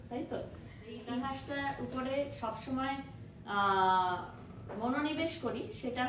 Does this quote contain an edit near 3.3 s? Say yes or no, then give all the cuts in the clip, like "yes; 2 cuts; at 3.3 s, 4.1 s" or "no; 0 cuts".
no; 1 cut; at 1.0 s